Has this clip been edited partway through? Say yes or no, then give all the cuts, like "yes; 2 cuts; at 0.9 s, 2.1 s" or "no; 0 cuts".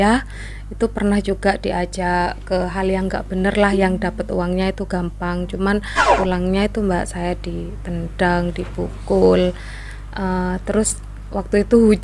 yes; 1 cut; at 6.0 s